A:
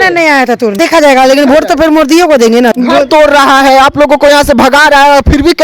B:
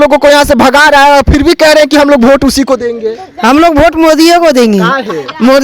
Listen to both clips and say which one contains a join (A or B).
A